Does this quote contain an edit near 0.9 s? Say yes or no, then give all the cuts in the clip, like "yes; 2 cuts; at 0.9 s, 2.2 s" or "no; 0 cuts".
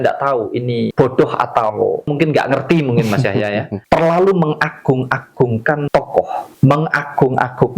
yes; 4 cuts; at 0.9 s, 2.1 s, 3.7 s, 6.0 s